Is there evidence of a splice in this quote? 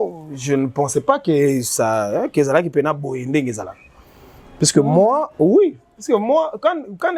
no; 0 cuts

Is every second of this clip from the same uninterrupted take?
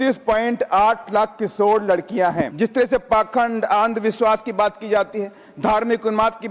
no; 1 cut; at 2.5 s

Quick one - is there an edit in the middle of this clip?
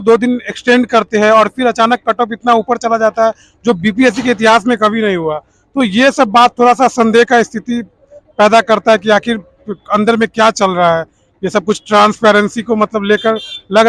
no; 0 cuts

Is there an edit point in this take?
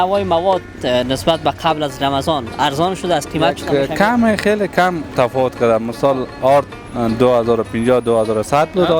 yes; 1 cut; at 3.6 s

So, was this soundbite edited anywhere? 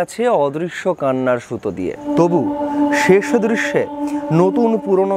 yes; 1 cut; at 2.0 s

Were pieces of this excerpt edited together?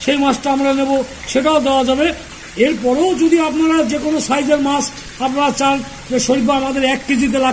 no; 0 cuts

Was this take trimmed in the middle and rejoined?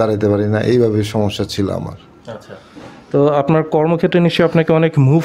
no; 0 cuts

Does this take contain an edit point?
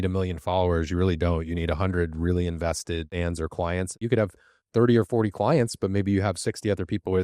yes; 2 cuts; at 3.1 s, 4.0 s

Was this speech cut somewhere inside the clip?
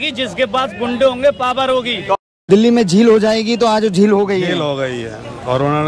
yes; 1 cut; at 2.2 s

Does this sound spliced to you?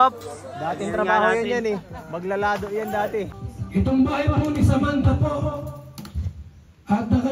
yes; 1 cut; at 3.3 s

